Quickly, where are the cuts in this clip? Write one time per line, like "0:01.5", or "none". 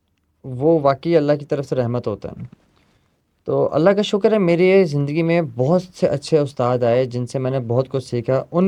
none